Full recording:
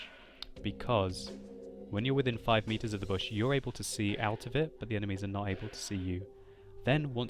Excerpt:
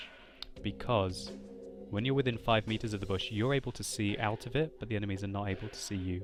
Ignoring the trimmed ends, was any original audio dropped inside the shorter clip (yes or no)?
no